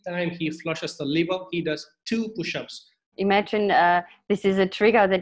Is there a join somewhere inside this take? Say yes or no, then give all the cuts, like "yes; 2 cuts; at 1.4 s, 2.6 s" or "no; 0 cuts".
yes; 1 cut; at 2.9 s